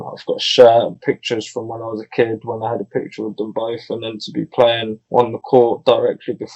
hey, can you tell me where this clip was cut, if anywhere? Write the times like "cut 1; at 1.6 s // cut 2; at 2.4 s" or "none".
cut 1; at 4.9 s